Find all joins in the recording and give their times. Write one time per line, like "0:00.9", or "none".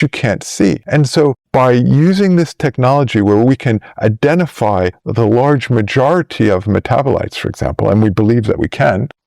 none

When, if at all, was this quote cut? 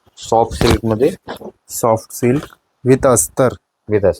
none

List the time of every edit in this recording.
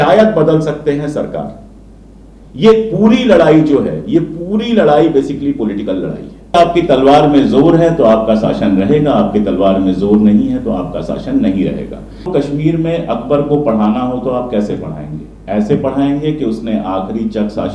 0:06.5
0:12.2

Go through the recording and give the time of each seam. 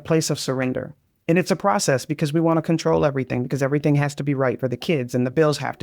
0:01.1

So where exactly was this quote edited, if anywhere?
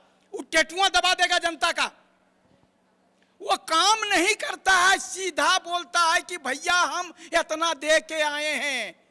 none

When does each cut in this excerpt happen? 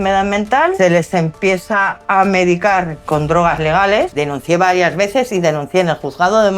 0:00.8
0:04.1

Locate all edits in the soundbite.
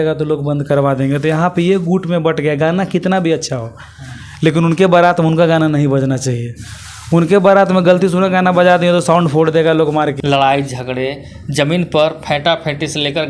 0:10.1

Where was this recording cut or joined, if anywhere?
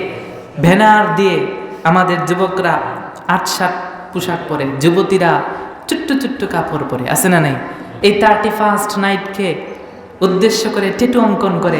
0:07.9

